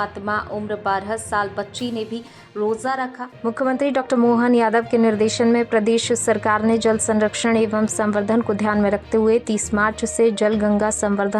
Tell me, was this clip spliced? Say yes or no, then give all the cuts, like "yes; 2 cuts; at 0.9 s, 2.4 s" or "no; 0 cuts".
yes; 1 cut; at 3.2 s